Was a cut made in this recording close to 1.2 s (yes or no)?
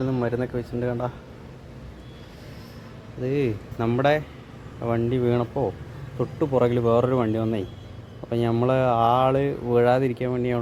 no